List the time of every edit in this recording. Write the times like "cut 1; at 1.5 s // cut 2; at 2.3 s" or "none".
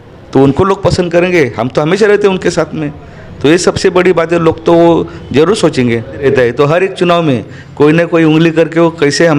cut 1; at 6.2 s

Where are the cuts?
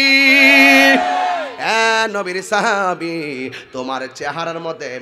cut 1; at 1.5 s

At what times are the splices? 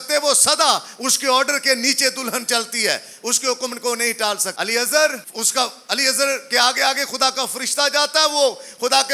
cut 1; at 4.5 s // cut 2; at 5.3 s

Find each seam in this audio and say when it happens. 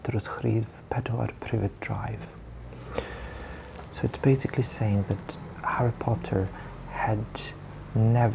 none

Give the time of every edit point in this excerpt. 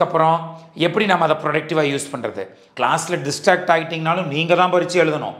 cut 1; at 2.6 s

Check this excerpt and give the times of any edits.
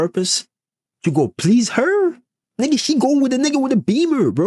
none

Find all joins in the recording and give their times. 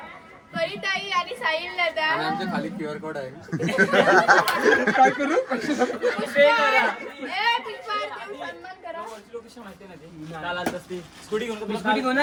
none

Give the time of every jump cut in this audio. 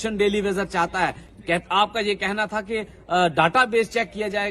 cut 1; at 1.3 s

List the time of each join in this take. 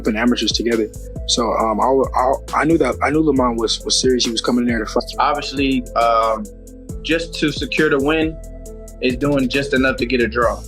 cut 1; at 5.0 s

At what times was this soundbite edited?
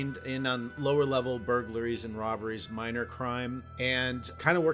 cut 1; at 3.7 s

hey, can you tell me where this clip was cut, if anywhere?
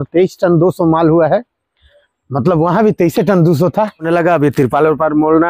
cut 1; at 4.0 s

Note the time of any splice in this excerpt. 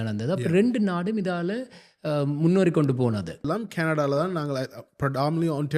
cut 1; at 3.4 s

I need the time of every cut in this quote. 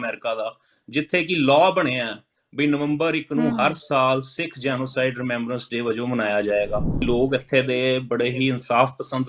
cut 1; at 7.0 s

